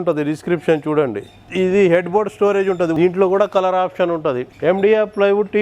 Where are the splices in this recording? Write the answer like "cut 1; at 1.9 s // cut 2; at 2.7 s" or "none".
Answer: cut 1; at 2.9 s // cut 2; at 4.5 s